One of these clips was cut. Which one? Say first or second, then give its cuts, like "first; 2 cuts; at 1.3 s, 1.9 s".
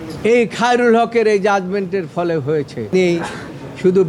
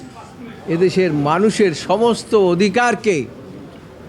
first; 1 cut; at 2.9 s